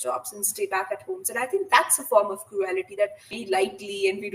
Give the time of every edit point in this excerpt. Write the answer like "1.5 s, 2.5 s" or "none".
3.4 s